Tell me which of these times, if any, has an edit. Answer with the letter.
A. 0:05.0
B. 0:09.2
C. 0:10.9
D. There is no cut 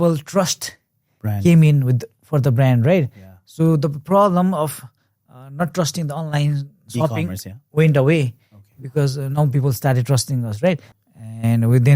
C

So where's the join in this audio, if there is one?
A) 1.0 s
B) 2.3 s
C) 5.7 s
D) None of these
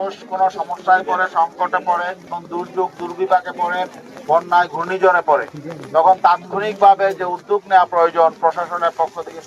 B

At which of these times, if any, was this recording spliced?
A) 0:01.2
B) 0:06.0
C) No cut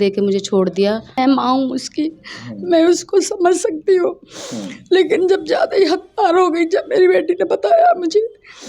A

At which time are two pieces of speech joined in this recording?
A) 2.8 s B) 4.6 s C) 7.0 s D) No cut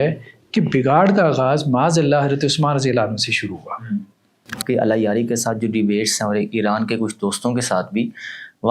B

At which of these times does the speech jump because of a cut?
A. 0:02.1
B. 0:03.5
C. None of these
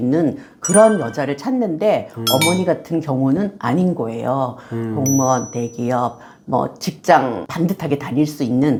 C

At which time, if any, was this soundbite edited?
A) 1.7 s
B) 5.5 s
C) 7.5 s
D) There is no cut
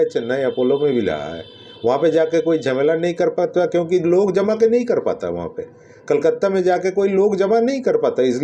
D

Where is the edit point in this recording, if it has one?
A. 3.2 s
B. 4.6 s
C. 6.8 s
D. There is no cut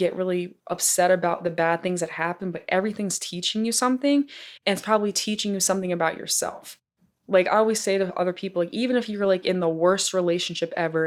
D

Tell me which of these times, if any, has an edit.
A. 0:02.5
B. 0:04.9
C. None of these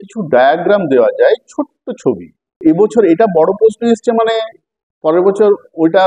A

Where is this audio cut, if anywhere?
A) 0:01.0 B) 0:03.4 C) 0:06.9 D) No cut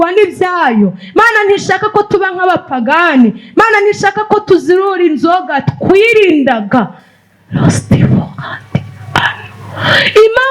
D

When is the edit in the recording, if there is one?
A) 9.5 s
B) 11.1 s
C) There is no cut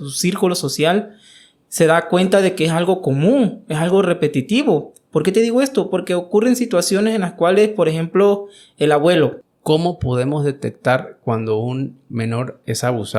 A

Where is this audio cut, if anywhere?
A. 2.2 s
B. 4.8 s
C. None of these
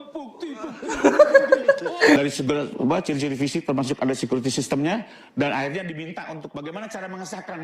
A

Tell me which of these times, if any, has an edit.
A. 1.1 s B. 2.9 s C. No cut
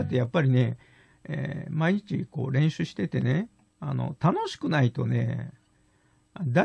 C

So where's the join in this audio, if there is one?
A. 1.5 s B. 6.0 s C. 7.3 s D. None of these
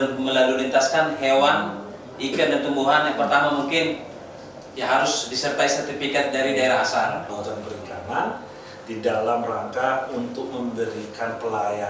C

